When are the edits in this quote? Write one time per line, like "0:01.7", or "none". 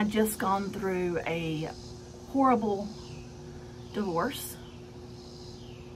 none